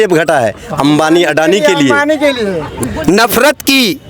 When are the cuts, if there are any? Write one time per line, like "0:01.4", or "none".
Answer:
0:02.7